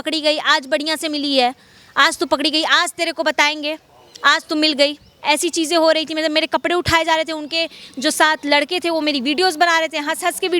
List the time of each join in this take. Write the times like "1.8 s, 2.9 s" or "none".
5.1 s